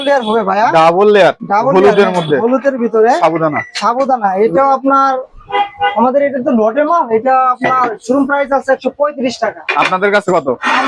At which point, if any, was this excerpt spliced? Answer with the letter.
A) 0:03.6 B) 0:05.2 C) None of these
C